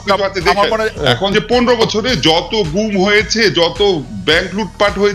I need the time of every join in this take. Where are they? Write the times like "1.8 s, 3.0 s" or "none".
0.9 s